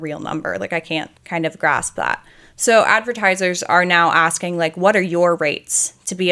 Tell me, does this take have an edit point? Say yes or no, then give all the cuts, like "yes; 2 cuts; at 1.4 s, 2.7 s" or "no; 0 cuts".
yes; 1 cut; at 1.2 s